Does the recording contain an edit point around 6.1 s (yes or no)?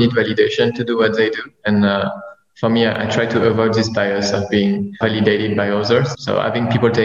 yes